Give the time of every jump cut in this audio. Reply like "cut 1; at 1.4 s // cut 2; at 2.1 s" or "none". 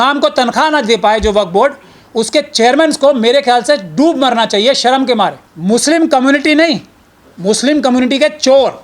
cut 1; at 5.5 s

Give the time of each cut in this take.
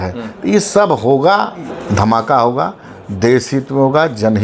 cut 1; at 1.7 s

